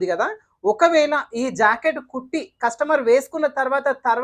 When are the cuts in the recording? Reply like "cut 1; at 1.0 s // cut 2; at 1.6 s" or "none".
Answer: none